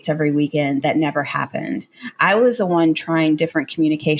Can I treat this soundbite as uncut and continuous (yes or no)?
yes